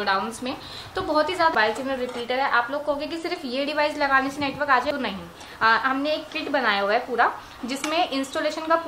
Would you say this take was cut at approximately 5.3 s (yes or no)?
no